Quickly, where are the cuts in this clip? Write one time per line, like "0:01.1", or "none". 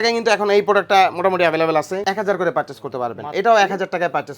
0:02.0